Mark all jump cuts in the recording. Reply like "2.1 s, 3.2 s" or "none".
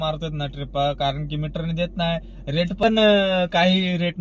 none